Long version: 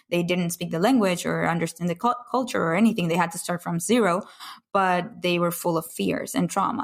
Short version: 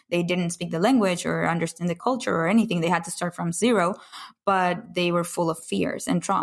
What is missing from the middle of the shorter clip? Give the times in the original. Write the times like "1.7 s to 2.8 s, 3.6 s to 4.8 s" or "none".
2.0 s to 2.2 s

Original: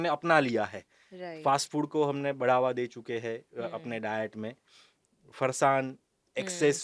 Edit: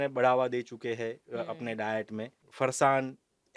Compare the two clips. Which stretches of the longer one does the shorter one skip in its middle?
4.7 s to 5.2 s

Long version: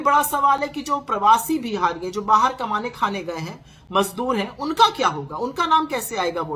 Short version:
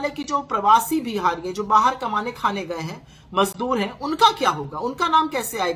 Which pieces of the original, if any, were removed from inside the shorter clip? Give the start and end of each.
none

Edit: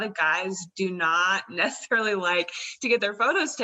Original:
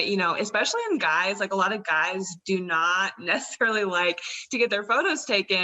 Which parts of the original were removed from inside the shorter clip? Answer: none

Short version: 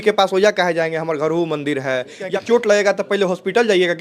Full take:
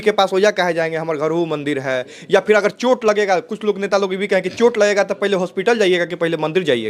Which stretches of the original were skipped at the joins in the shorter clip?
2.3 s to 4.4 s

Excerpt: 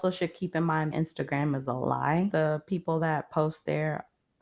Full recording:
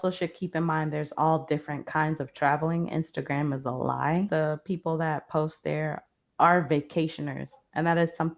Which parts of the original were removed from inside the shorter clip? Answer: 0.9 s to 2.9 s

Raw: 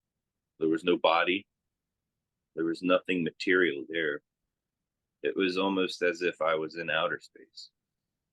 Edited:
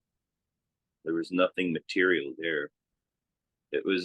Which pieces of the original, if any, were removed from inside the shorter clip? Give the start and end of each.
none

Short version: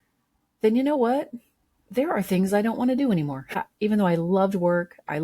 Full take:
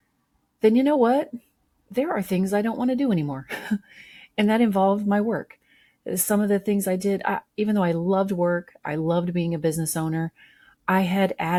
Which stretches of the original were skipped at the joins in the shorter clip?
3.6 s to 7.3 s

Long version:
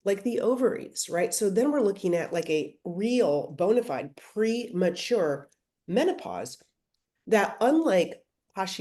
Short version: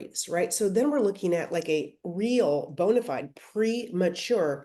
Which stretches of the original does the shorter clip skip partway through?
none

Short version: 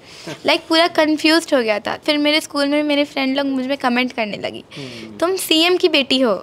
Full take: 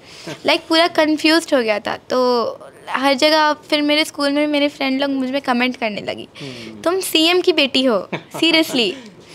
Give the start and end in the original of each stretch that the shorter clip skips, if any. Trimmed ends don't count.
2.0 s to 3.6 s

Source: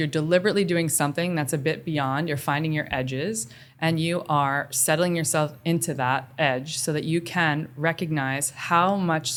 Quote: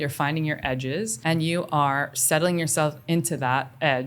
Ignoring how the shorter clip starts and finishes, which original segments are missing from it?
3.4 s to 3.7 s

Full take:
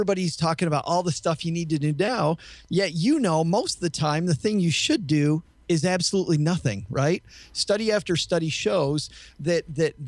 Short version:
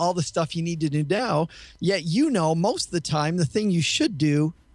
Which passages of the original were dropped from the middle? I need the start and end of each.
none

